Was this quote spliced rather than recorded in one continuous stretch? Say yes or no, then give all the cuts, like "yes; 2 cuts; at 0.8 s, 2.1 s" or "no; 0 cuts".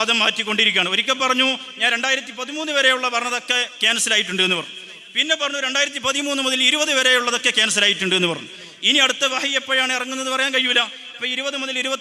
no; 0 cuts